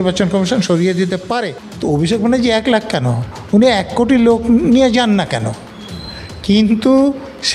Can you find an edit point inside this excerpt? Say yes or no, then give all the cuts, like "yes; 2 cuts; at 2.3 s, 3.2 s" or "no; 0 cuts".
yes; 1 cut; at 1.6 s